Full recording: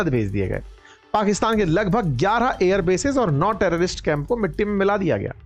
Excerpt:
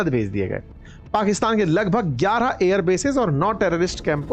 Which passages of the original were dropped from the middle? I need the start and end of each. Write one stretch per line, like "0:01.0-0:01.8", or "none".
none